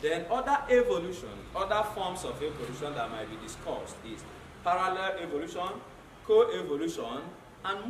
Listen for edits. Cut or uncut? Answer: uncut